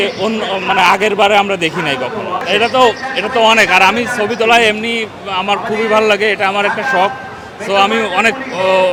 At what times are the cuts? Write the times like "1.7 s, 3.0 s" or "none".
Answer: none